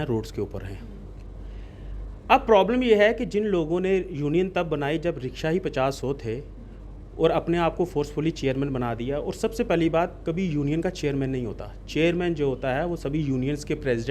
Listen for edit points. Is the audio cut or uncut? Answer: uncut